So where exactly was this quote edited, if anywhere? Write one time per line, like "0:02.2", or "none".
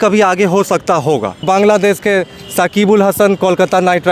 0:01.4